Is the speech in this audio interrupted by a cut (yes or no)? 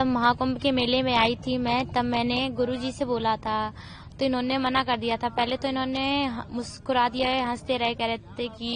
no